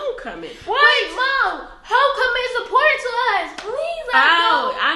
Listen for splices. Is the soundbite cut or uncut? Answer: uncut